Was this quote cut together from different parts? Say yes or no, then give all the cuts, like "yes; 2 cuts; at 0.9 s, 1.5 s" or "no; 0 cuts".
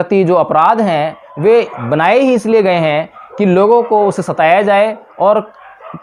no; 0 cuts